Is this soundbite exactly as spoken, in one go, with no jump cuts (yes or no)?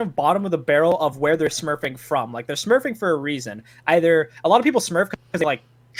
yes